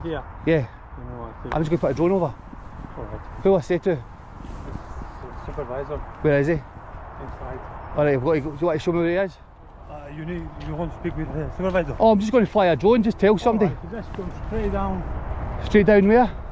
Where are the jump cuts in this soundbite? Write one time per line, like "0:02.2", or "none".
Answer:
none